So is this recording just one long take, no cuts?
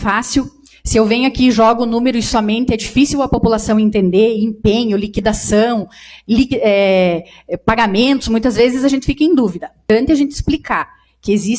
no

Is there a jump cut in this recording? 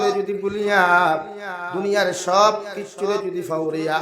no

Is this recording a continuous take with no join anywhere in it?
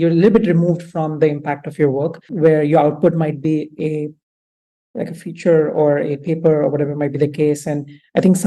yes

